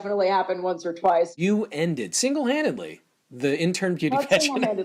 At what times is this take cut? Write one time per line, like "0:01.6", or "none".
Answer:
0:01.3